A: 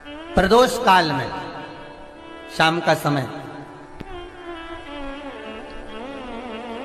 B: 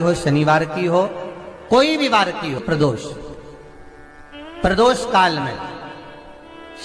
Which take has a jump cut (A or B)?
B